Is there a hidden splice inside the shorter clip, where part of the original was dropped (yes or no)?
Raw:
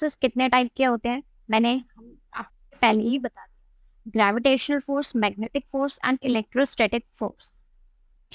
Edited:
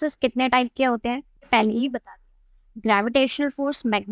yes